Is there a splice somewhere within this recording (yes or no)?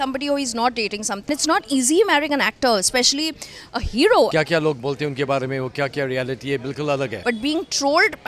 yes